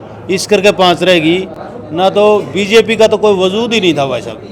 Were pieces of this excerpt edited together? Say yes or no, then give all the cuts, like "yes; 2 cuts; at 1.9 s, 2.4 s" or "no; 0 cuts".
no; 0 cuts